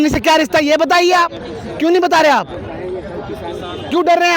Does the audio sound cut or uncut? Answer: uncut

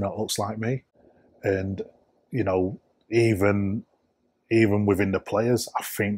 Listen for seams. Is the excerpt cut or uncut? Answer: uncut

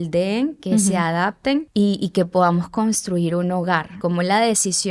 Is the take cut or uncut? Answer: cut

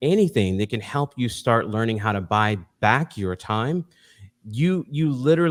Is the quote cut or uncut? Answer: uncut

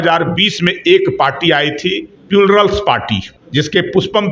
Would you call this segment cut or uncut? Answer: cut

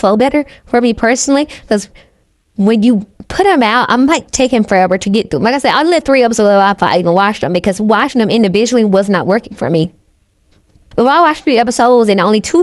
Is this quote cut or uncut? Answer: cut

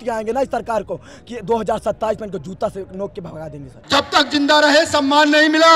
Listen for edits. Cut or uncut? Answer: cut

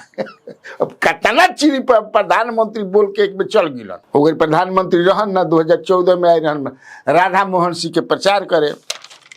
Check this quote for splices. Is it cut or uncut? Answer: uncut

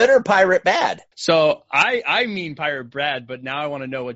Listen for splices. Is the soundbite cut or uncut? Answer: cut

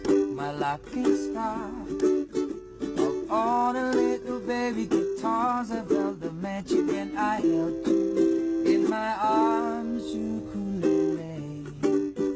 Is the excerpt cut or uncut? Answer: uncut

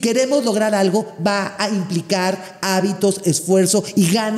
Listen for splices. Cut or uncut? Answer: uncut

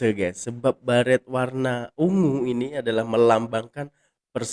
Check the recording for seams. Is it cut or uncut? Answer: uncut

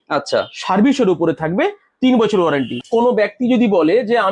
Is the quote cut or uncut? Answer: cut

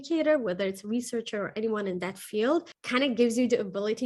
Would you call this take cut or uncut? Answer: cut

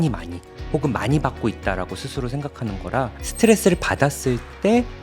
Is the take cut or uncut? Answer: cut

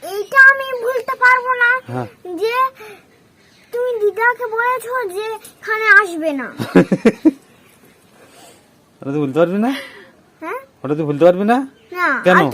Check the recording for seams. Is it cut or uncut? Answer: uncut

